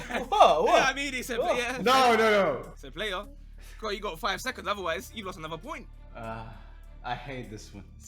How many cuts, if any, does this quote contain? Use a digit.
1